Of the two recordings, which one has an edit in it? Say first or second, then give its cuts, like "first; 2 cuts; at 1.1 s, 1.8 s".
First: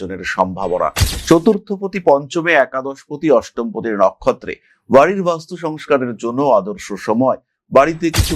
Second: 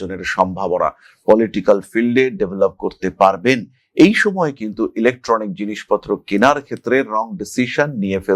first; 1 cut; at 1.1 s